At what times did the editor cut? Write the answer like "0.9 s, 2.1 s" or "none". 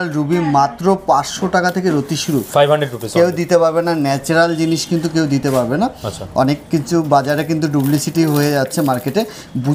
none